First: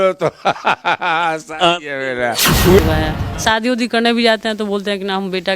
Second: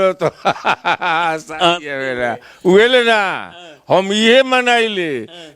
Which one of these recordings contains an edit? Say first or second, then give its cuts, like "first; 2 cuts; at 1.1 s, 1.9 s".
first; 1 cut; at 2.8 s